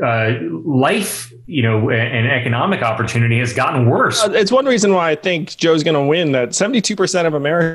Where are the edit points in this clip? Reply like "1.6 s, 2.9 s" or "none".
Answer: 4.2 s